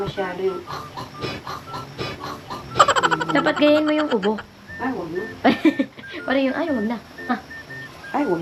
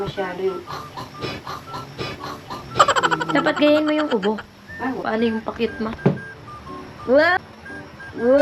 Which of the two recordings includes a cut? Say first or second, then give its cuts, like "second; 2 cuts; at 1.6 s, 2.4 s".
second; 1 cut; at 5.0 s